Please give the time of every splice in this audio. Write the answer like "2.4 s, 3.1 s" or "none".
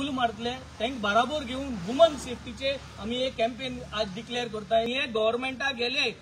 4.9 s